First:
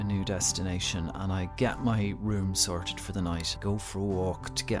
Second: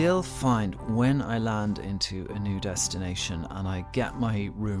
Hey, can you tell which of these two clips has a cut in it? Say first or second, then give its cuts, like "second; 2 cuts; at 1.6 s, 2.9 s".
first; 1 cut; at 3.5 s